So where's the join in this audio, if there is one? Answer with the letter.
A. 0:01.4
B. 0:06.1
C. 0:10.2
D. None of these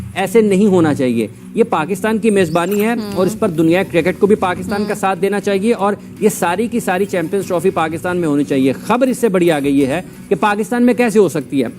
A